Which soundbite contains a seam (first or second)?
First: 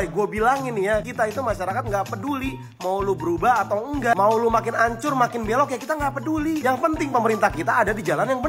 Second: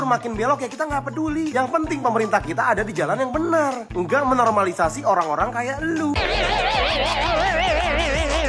second